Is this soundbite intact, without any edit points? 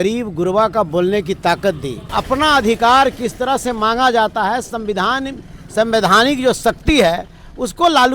no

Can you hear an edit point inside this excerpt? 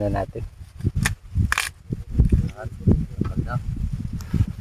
yes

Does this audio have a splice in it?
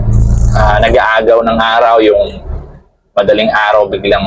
no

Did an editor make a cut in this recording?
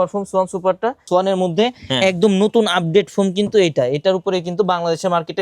yes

